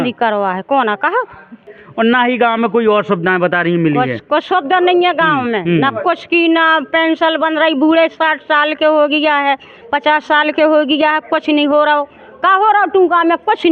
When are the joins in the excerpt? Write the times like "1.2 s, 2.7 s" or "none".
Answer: 1.7 s